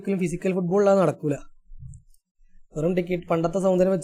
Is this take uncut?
yes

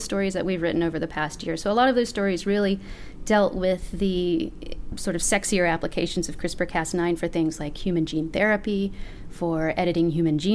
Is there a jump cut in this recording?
no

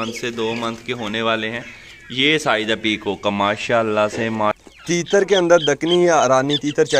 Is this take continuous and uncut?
no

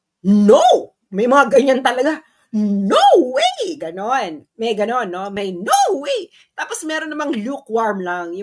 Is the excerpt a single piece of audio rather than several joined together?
yes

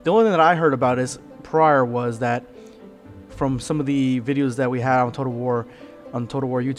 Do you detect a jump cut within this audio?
no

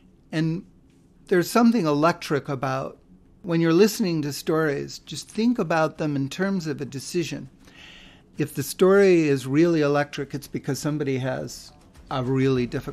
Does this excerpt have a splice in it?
yes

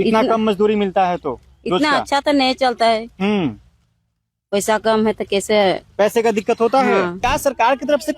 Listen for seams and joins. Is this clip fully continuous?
no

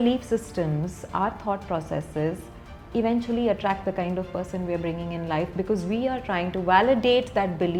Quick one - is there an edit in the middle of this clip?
no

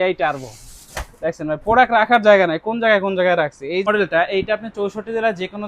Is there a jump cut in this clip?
yes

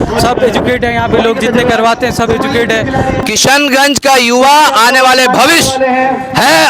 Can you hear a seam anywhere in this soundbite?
yes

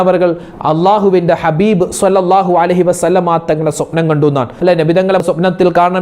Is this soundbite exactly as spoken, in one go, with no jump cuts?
no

